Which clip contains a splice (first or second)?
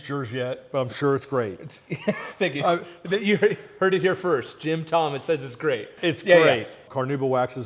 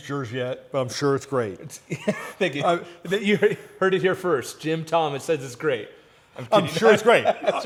first